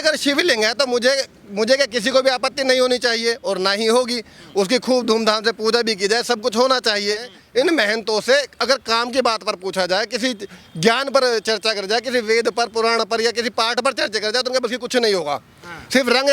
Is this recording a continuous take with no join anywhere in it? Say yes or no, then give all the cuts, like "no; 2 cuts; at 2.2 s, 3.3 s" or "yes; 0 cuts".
no; 1 cut; at 7.3 s